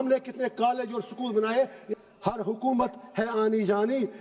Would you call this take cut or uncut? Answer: cut